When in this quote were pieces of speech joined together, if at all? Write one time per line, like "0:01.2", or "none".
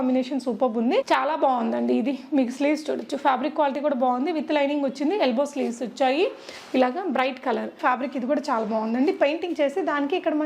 0:01.1
0:07.8

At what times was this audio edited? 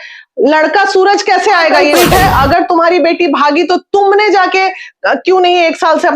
0:02.0

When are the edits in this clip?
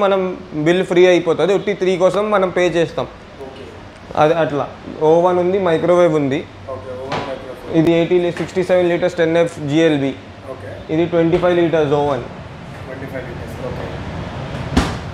none

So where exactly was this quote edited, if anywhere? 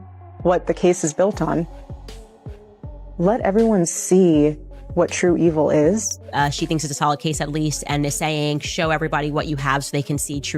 0:06.2

